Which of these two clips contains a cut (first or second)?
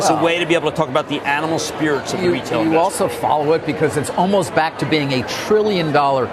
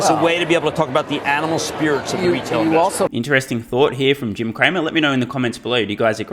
first